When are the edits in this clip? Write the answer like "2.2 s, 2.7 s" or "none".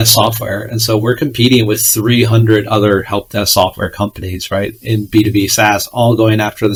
none